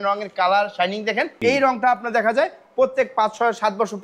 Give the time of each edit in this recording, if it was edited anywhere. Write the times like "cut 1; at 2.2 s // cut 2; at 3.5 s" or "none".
cut 1; at 1.3 s